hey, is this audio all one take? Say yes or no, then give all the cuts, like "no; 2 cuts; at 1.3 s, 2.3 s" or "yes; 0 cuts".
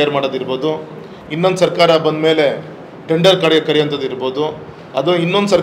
yes; 0 cuts